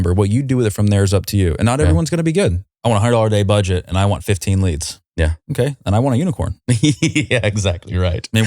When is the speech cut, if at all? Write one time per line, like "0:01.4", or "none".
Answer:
0:02.7